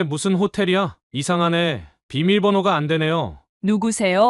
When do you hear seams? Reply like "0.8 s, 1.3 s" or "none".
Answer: 1.0 s, 3.4 s